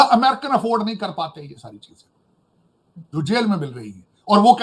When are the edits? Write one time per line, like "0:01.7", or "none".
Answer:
none

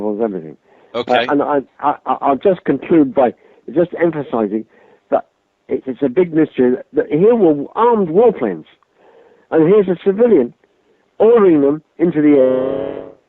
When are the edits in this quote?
0:11.5

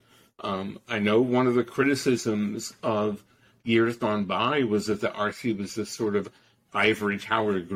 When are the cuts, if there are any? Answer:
none

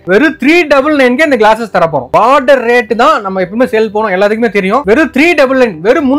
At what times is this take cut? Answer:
0:02.1
0:04.8

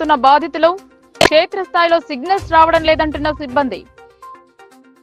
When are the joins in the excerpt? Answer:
none

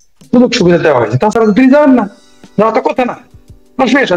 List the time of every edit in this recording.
none

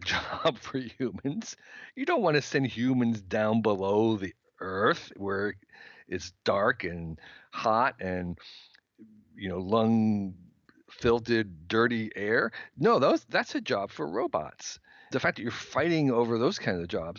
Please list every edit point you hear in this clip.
0:15.1

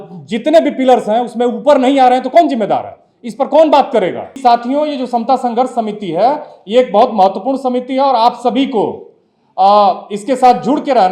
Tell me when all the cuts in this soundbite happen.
0:04.4

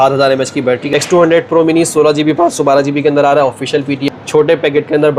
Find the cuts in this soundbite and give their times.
0:00.8
0:04.0

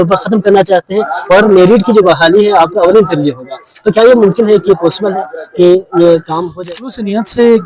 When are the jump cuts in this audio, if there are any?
0:06.5

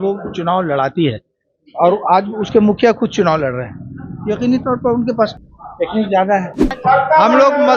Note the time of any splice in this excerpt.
0:05.4
0:06.7

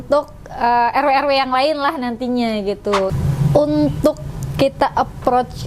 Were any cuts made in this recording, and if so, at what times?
0:03.1

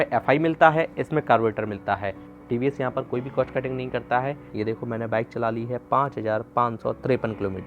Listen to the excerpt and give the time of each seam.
0:02.3
0:04.4

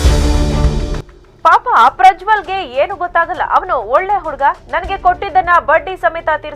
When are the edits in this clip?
0:01.0

